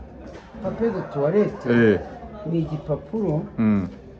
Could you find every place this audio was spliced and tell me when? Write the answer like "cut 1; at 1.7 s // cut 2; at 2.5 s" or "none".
none